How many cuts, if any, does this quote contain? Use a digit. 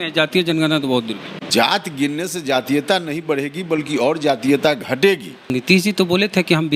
2